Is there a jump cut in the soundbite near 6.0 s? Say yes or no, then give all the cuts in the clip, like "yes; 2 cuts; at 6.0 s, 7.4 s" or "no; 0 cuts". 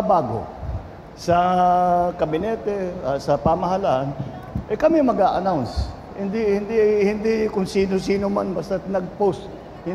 no; 0 cuts